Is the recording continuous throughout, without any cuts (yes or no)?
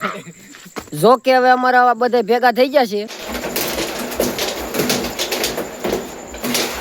no